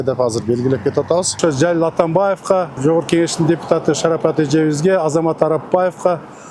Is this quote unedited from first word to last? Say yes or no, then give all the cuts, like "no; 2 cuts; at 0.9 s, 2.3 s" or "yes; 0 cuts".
no; 2 cuts; at 1.4 s, 2.8 s